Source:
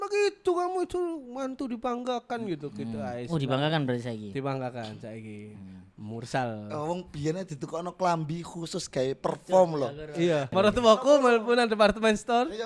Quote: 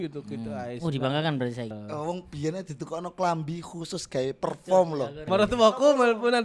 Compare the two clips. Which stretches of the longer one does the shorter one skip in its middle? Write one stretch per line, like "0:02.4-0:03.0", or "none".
0:04.2-0:06.6
0:10.0-0:10.5